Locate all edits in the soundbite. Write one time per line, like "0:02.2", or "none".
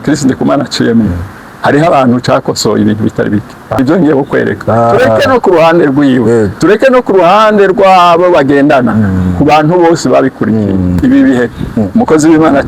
0:03.8
0:11.0